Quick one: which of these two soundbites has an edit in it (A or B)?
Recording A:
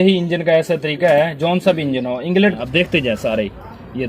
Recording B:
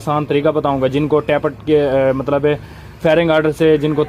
A